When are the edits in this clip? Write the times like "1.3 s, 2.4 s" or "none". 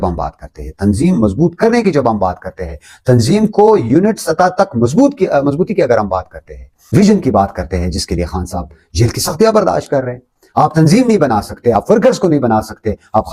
7.0 s

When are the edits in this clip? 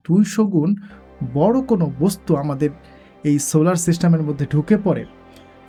none

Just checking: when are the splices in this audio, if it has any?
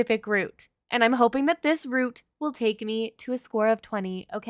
none

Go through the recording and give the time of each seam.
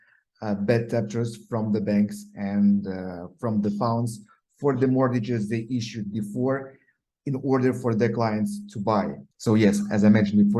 9.3 s

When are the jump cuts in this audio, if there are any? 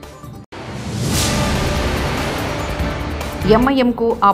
3.4 s

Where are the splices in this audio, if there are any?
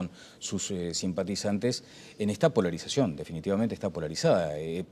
3.3 s

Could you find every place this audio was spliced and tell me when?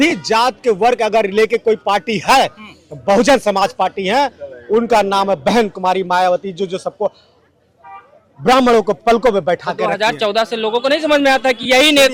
none

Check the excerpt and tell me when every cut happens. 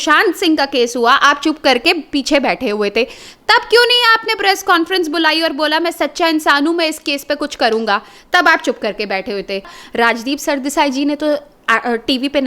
9.8 s

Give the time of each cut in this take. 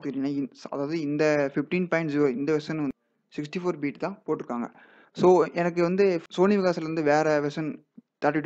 2.9 s, 6.2 s

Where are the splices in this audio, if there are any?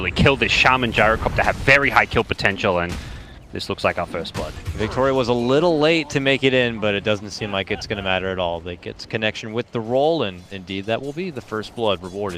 6.1 s

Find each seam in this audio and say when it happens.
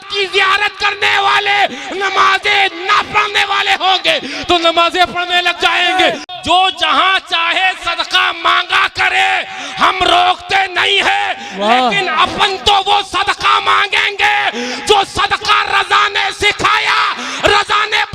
6.3 s

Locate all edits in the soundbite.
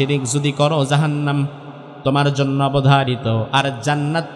none

